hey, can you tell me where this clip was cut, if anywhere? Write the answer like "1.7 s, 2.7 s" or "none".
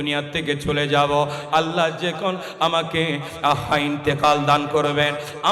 none

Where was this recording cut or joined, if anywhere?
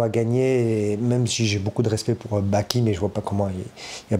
none

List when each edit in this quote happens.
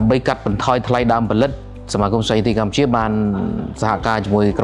none

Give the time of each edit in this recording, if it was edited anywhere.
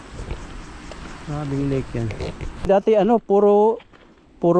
none

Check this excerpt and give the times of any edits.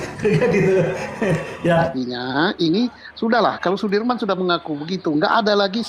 1.9 s

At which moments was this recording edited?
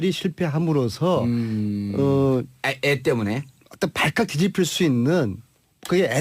4.1 s

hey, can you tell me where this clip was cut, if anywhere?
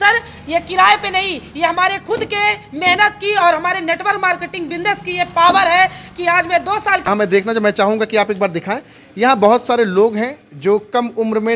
7.1 s

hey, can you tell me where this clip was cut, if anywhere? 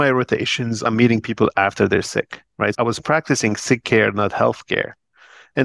0.8 s, 2.8 s

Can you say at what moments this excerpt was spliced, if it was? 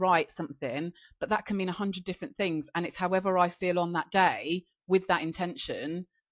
none

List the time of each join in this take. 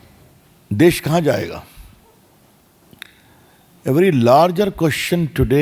none

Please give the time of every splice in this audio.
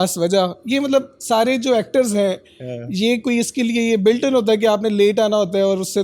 none

